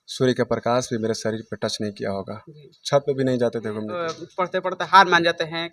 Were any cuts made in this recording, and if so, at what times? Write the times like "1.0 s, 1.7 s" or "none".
3.9 s

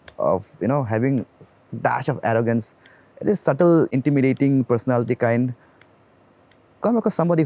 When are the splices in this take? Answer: 3.9 s

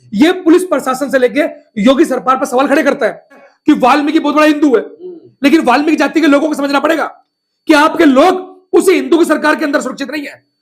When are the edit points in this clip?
3.5 s

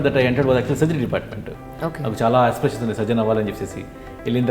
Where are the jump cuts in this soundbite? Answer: none

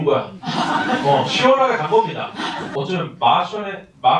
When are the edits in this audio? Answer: 2.6 s

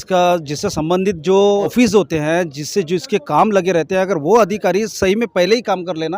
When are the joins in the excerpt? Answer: 1.7 s

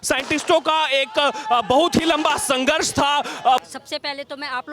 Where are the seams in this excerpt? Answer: 3.6 s

